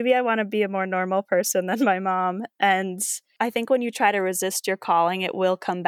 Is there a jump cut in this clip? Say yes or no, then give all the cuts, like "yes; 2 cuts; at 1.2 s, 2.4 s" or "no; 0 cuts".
yes; 1 cut; at 3.3 s